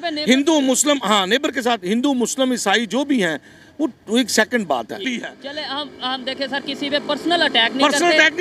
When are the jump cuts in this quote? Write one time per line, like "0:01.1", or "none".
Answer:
0:05.0